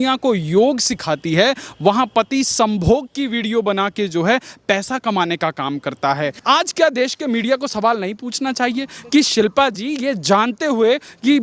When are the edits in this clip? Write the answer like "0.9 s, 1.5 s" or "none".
6.4 s